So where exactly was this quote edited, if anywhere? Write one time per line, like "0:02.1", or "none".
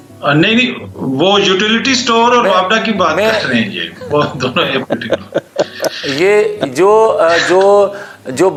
none